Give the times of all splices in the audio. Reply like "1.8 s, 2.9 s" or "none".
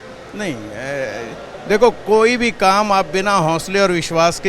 none